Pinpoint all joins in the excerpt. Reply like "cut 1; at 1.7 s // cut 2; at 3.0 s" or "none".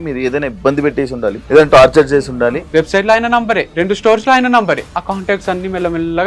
cut 1; at 1.4 s // cut 2; at 2.6 s // cut 3; at 3.7 s // cut 4; at 4.9 s